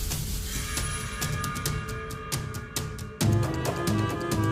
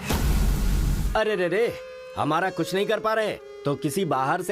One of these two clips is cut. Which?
second; 1 cut; at 1.0 s

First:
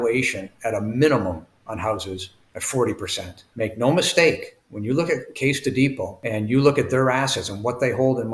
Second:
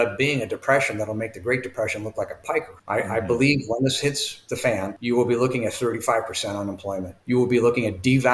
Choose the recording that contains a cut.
first; 1 cut; at 3.5 s

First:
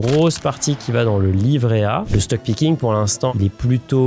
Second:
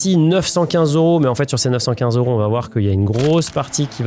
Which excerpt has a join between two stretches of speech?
first; 2 cuts; at 2.1 s, 3.3 s

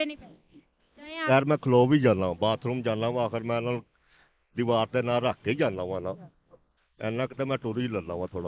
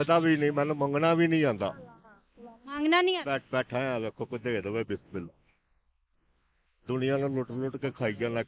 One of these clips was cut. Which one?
first; 1 cut; at 1.3 s

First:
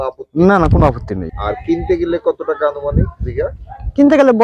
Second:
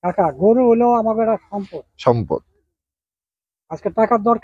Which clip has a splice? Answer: first; 1 cut; at 1.3 s

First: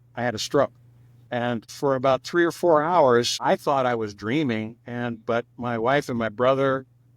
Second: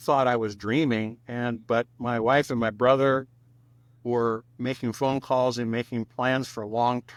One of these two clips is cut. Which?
first; 1 cut; at 1.2 s

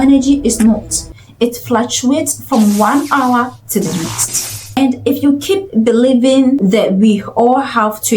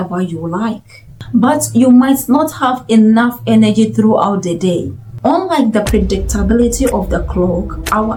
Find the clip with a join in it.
first; 1 cut; at 6.6 s

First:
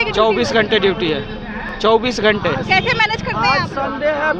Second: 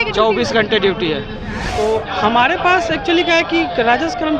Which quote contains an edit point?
second; 1 cut; at 1.6 s

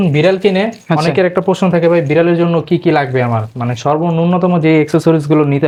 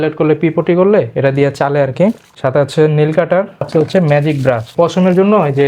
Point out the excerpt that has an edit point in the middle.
second; 3 cuts; at 2.3 s, 3.7 s, 4.7 s

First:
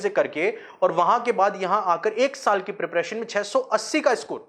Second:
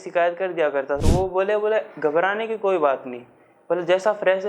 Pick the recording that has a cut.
second; 1 cut; at 1.0 s

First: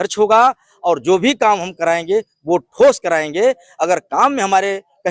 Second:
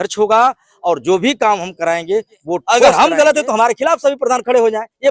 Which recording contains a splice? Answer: second; 1 cut; at 2.8 s

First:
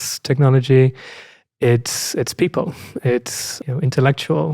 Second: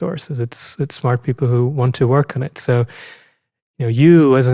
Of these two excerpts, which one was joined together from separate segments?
first; 1 cut; at 3.6 s

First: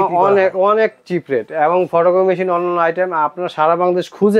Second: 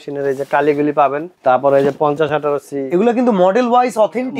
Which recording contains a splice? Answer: second; 1 cut; at 1.3 s

